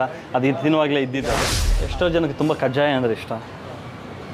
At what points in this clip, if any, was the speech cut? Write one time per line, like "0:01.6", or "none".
0:01.5